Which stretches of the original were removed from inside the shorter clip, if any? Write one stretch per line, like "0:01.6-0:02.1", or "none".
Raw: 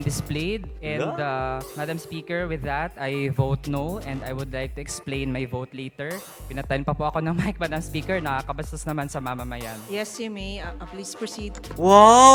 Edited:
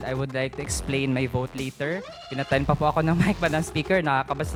none

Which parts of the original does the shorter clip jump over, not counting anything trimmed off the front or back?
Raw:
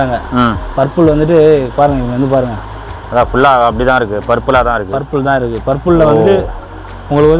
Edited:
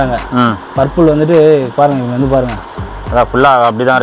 none

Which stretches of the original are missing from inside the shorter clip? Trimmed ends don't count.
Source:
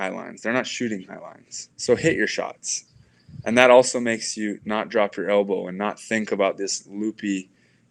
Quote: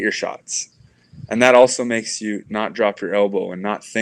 none

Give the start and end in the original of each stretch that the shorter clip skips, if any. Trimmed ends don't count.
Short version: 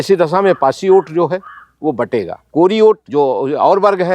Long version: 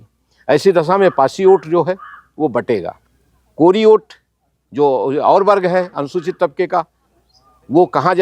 0:02.9-0:03.4
0:04.1-0:04.7

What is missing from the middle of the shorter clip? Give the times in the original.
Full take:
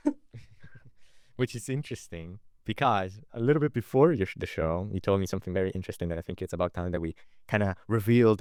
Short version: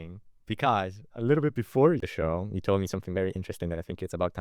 0:04.2-0:04.4

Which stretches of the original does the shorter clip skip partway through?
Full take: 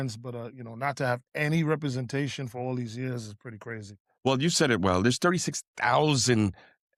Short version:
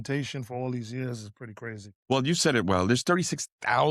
0:03.9-0:04.0

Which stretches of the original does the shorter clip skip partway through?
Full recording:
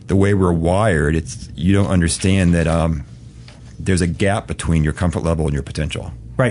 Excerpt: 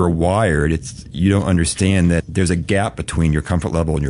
0:02.6-0:03.7

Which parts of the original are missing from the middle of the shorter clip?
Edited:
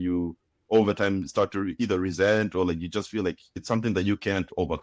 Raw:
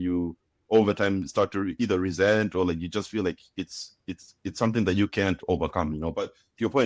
0:03.5-0:04.4

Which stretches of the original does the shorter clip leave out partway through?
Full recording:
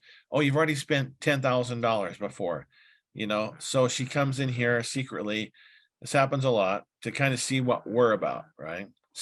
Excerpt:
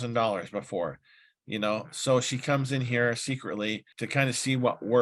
0:05.6-0:07.0

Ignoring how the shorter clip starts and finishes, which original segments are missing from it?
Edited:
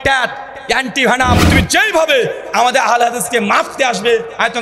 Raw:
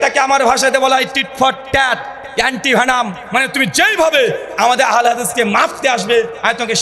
0:03.1-0:03.5

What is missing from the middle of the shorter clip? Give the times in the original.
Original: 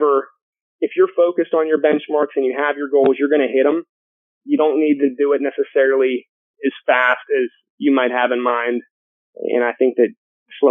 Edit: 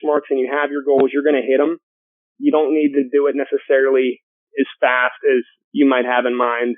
none

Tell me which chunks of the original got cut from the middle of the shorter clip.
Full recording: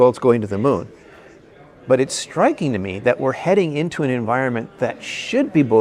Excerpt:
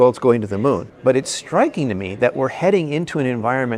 0:00.9-0:01.7

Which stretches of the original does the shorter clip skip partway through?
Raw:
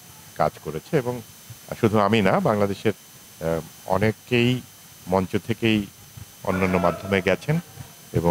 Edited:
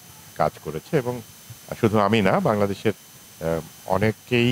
none

